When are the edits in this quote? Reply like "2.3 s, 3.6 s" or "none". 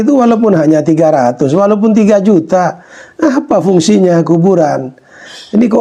none

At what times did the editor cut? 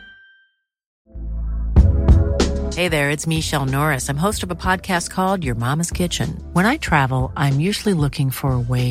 1.0 s

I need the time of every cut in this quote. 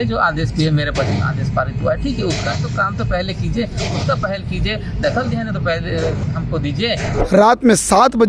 7.1 s

